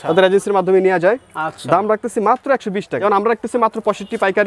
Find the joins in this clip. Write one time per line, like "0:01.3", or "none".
0:02.9